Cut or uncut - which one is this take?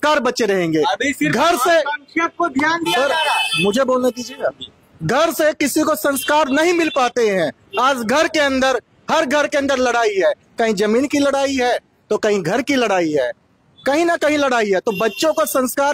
uncut